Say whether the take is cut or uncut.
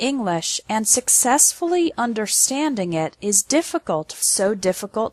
uncut